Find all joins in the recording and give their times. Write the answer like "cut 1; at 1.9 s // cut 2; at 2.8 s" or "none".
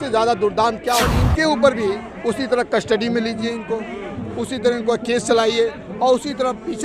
cut 1; at 1.2 s